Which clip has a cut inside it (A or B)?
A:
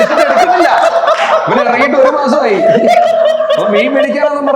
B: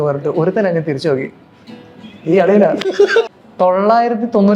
B